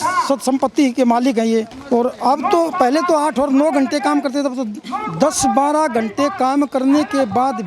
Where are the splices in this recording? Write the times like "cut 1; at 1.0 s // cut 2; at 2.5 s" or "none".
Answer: cut 1; at 1.8 s